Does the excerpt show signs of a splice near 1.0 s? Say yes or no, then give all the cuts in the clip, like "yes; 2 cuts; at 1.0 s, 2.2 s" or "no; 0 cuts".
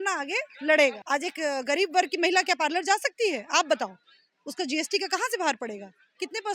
yes; 1 cut; at 1.0 s